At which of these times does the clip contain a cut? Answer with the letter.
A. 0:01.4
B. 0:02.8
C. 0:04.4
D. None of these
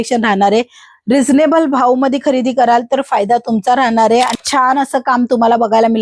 C